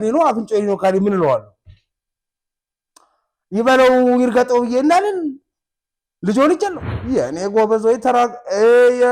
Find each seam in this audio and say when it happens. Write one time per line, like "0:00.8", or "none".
0:06.9